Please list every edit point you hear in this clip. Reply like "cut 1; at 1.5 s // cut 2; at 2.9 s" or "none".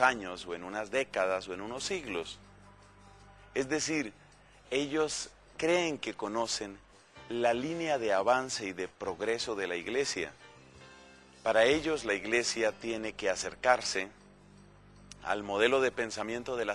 cut 1; at 11.6 s